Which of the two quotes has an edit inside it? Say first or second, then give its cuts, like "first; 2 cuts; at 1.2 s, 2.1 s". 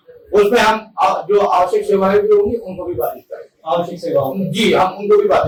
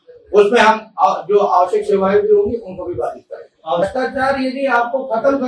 second; 1 cut; at 3.8 s